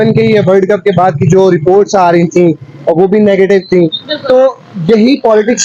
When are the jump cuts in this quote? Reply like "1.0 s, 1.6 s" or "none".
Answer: none